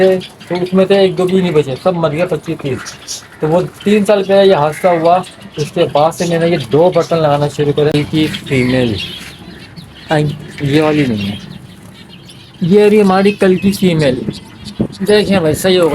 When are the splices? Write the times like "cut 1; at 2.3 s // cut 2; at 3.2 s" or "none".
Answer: cut 1; at 7.9 s

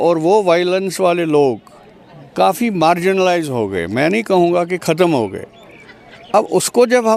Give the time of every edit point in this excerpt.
none

